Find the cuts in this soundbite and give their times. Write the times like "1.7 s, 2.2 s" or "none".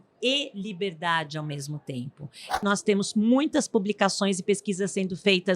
2.6 s